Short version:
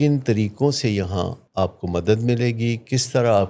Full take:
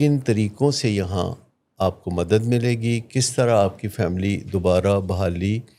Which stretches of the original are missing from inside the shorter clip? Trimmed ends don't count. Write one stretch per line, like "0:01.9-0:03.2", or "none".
0:01.4-0:01.6